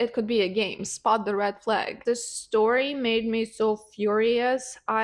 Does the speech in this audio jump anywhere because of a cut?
yes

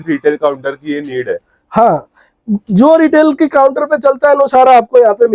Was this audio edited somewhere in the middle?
no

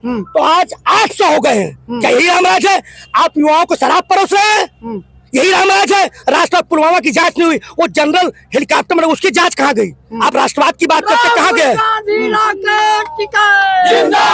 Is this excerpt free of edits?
yes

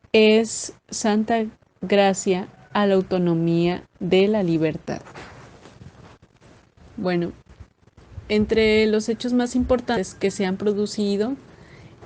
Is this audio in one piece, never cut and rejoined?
no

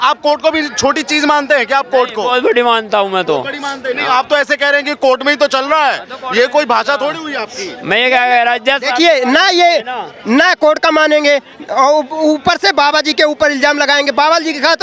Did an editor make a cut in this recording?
no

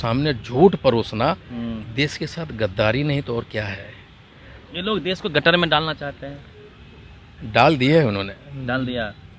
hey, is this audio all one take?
yes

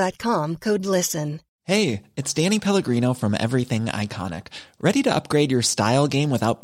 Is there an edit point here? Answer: yes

